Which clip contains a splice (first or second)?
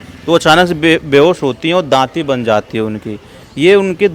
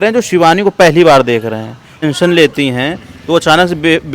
second